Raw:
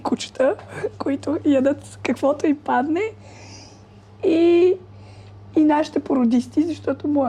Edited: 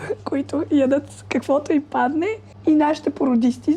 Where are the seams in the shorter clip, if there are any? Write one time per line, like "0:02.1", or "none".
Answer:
0:02.5